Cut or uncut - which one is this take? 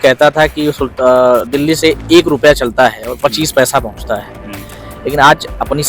uncut